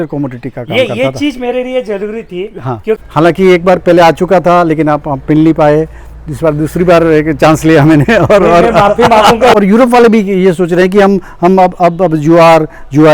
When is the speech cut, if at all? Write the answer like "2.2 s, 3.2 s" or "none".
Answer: 3.0 s, 9.5 s